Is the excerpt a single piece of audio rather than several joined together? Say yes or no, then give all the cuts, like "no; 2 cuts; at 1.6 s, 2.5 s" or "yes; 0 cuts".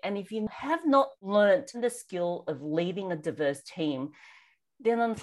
no; 2 cuts; at 0.8 s, 1.8 s